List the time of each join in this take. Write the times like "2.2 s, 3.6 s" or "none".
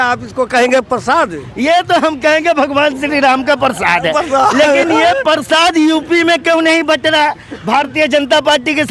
none